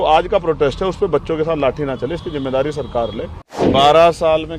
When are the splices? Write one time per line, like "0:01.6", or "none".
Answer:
0:03.7